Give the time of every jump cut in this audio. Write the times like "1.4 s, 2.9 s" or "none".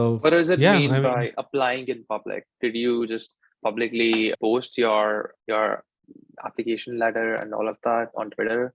none